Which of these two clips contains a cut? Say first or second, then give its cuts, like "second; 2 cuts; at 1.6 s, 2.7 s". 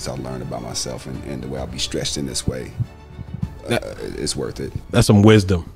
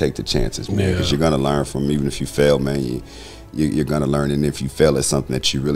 first; 1 cut; at 4.7 s